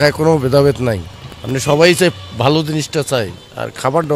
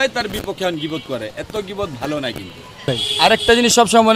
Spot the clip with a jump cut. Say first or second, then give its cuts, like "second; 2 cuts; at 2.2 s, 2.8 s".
second; 1 cut; at 3.0 s